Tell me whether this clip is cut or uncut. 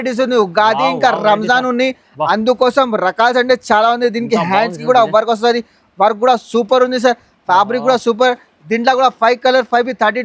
uncut